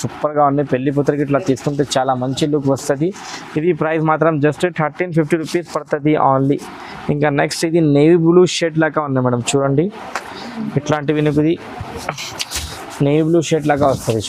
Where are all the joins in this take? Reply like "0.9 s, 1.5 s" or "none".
none